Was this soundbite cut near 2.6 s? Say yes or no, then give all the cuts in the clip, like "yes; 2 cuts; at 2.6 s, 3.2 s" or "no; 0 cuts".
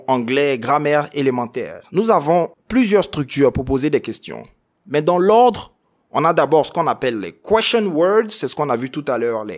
yes; 2 cuts; at 1.8 s, 2.6 s